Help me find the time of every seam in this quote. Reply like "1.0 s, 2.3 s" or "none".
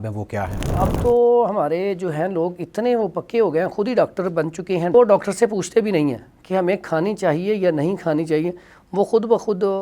0.8 s, 4.9 s

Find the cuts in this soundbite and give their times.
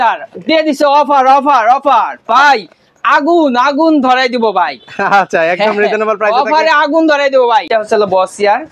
7.7 s

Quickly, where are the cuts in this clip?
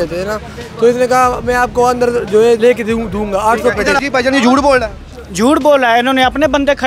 2.6 s, 4.0 s

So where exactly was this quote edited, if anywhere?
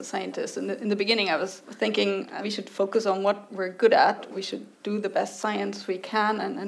1.6 s, 2.3 s, 4.4 s

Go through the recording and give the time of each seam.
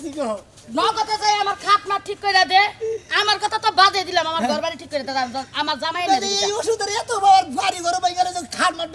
none

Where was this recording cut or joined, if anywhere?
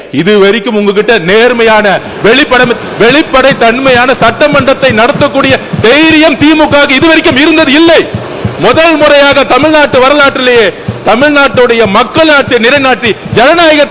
none

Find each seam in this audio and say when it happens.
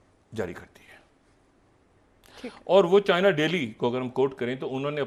none

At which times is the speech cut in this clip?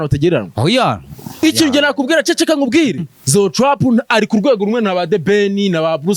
3.1 s

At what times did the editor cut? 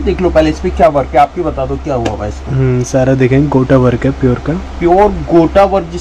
none

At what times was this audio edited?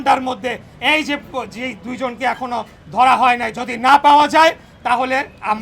3.5 s

